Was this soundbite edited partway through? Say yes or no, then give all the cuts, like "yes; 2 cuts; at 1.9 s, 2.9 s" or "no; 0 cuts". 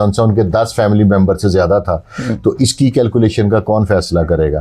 no; 0 cuts